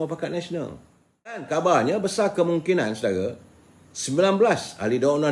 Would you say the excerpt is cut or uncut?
cut